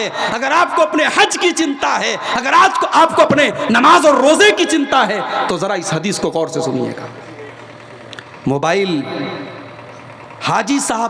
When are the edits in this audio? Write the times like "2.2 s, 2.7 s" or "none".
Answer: 8.2 s